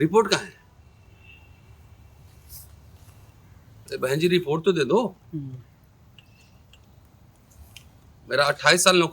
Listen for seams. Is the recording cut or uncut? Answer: uncut